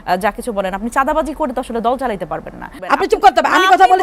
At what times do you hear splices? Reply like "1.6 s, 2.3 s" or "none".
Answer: 2.6 s